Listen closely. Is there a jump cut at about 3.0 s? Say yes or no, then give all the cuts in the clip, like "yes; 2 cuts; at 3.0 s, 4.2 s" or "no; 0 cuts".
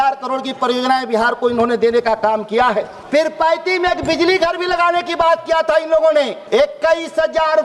yes; 2 cuts; at 3.0 s, 6.4 s